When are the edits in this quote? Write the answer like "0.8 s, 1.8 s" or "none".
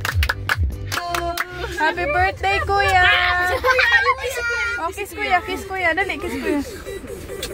1.0 s